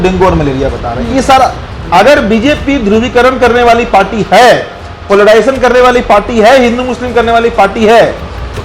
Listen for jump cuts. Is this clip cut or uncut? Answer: cut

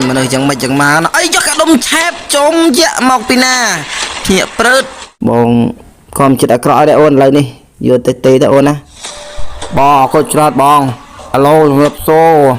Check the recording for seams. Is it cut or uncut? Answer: cut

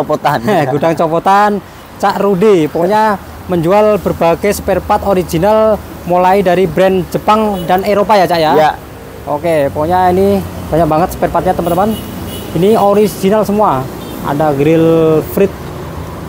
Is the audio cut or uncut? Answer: uncut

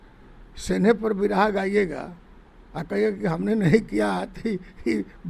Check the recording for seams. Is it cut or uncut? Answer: uncut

